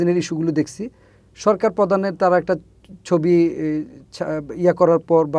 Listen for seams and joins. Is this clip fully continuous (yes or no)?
yes